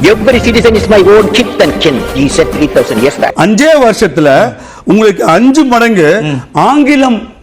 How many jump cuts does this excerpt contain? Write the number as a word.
one